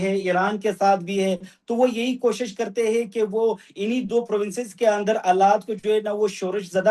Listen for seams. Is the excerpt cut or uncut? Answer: uncut